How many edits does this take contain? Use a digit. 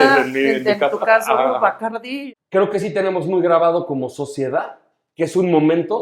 1